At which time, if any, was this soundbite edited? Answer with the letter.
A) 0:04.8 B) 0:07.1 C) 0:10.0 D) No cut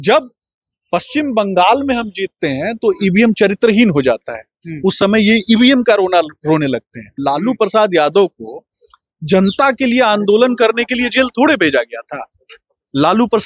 B